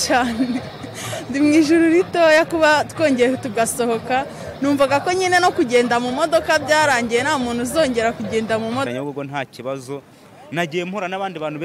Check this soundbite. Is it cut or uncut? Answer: cut